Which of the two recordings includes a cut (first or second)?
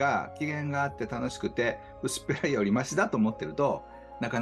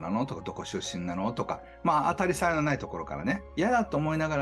second